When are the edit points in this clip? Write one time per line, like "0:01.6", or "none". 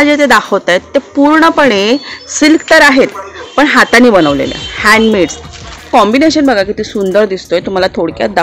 0:05.9